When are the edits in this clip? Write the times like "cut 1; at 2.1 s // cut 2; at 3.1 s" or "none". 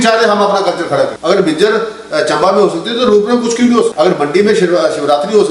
cut 1; at 3.9 s